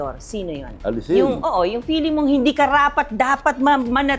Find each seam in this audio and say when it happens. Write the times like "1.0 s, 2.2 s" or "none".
none